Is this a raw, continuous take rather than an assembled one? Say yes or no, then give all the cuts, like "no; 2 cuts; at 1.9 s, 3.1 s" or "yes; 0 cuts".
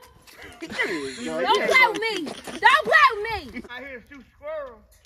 no; 1 cut; at 3.5 s